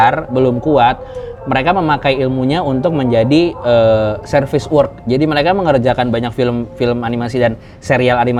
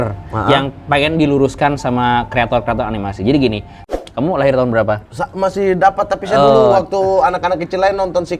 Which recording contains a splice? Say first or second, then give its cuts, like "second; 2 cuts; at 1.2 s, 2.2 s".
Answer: second; 1 cut; at 3.9 s